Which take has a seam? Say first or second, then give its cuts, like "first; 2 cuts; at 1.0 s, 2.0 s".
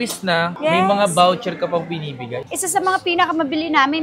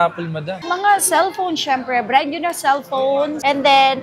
first; 1 cut; at 2.4 s